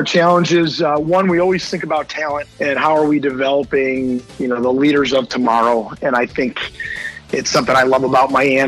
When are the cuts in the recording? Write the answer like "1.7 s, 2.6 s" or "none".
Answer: 2.5 s, 4.3 s